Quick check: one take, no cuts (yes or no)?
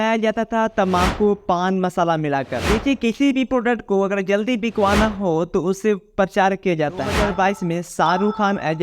no